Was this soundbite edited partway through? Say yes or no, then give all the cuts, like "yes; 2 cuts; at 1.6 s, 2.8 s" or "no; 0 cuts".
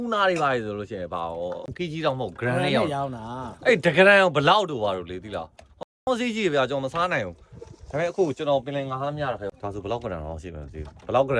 yes; 2 cuts; at 1.8 s, 9.5 s